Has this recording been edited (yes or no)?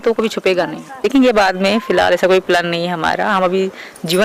no